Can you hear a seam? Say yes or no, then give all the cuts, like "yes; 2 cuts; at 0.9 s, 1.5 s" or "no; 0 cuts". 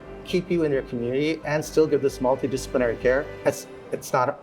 yes; 1 cut; at 3.3 s